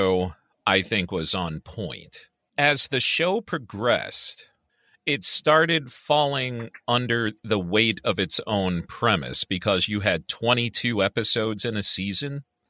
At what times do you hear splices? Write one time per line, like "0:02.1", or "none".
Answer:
0:02.5